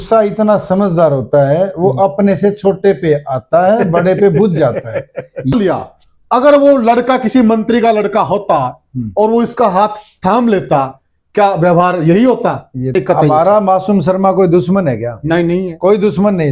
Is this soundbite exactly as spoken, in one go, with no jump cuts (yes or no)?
no